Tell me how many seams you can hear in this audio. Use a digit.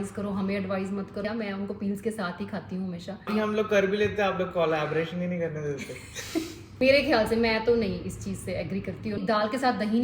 4